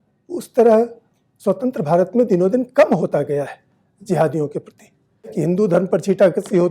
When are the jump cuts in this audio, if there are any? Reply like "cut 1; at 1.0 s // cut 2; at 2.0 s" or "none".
cut 1; at 5.3 s

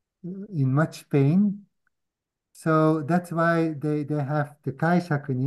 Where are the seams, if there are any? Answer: none

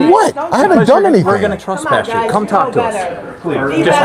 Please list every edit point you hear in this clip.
none

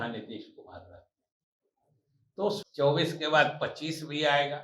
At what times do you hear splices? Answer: cut 1; at 2.6 s

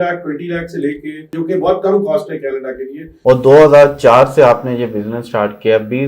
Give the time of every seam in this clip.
cut 1; at 1.3 s // cut 2; at 3.1 s

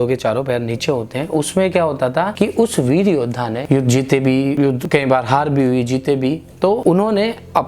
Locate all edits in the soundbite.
cut 1; at 2.3 s // cut 2; at 3.6 s // cut 3; at 4.6 s // cut 4; at 6.8 s

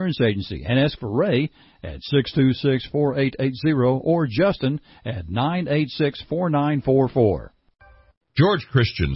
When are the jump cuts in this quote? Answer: cut 1; at 7.6 s

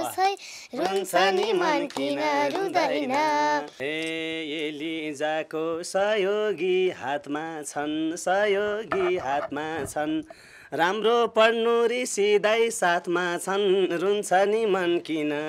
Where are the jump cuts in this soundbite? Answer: cut 1; at 3.8 s

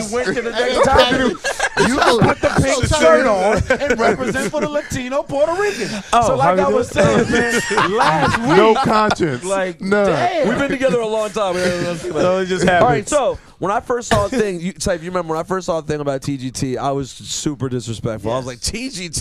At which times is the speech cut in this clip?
none

